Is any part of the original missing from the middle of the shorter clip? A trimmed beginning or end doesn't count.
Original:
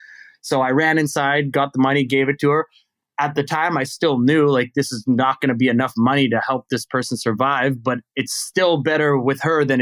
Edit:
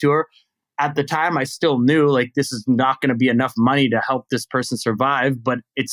no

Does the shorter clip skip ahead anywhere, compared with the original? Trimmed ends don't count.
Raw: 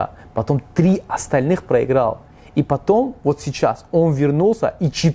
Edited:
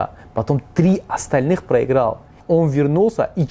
yes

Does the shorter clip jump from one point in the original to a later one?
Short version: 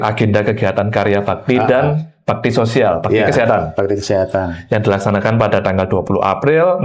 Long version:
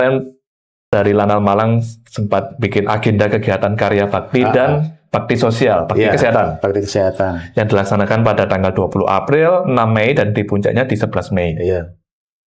no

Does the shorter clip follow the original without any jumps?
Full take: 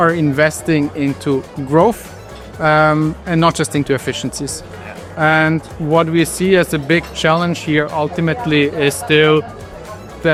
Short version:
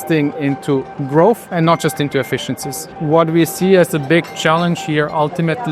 no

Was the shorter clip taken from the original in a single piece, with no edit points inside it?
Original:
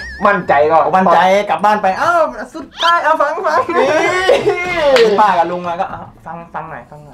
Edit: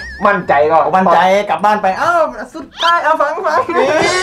yes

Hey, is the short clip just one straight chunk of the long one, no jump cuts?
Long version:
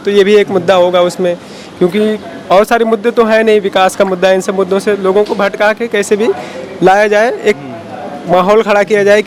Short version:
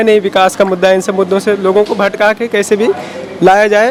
yes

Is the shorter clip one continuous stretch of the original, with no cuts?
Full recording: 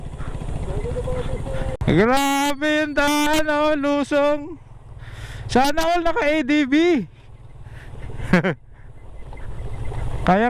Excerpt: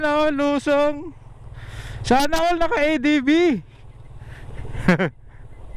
yes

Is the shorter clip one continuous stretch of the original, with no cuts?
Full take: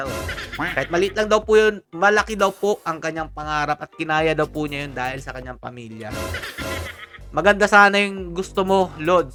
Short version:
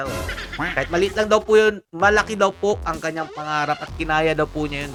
yes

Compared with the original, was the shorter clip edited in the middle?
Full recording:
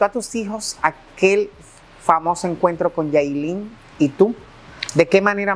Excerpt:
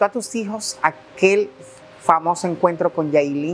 no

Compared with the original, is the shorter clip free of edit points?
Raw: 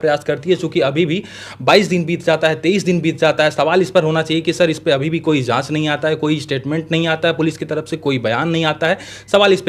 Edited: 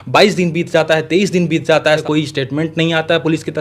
no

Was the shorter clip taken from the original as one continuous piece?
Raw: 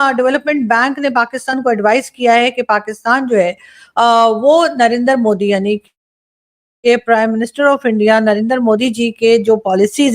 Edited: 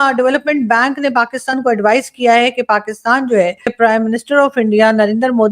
no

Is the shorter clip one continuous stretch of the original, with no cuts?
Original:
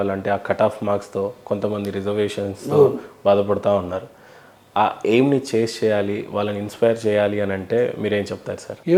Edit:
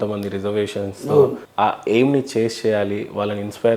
no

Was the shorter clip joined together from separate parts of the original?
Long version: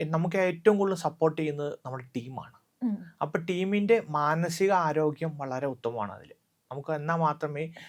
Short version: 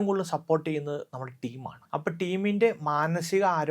yes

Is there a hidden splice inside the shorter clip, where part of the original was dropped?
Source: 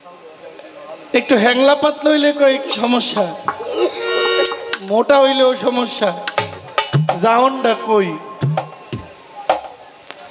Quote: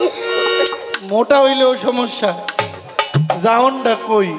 no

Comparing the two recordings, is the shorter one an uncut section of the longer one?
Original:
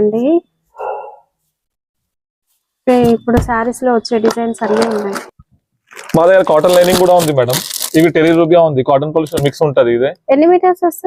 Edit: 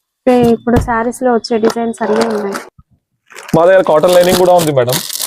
yes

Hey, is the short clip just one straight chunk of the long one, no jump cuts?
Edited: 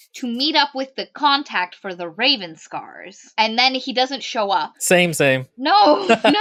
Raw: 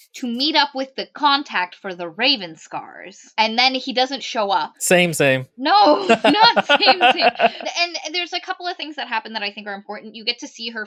yes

